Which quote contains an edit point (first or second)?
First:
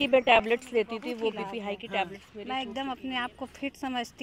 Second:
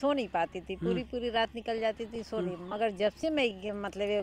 first